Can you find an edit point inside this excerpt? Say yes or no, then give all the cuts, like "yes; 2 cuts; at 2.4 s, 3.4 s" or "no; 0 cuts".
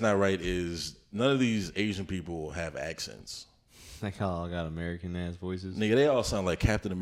no; 0 cuts